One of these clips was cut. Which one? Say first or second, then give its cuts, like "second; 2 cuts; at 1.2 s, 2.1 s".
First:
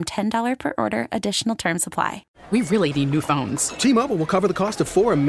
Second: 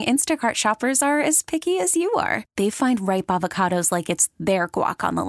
first; 1 cut; at 2.3 s